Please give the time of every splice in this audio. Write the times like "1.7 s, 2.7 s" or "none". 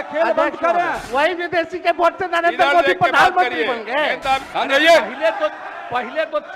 1.0 s, 4.4 s

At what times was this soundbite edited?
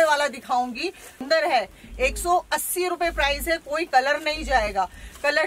1.2 s

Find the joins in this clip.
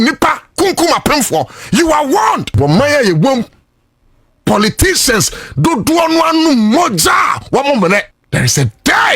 2.5 s, 8.2 s

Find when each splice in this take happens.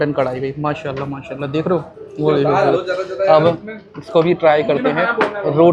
none

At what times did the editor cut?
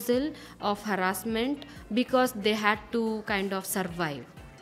none

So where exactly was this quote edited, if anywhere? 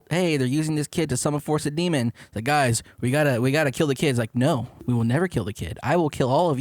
4.7 s

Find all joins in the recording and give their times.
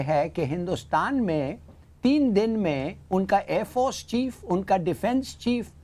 none

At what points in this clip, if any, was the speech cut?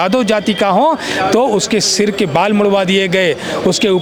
none

